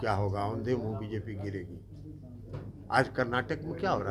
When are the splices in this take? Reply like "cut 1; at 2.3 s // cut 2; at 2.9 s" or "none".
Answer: none